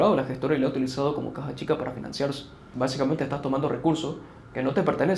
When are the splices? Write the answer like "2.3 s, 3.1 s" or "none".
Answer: 2.6 s